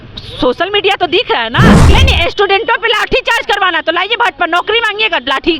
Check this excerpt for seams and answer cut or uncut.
cut